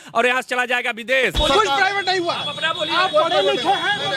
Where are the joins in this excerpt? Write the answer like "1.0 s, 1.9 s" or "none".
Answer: 1.4 s